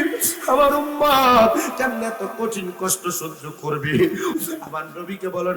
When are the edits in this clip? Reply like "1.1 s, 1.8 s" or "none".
4.3 s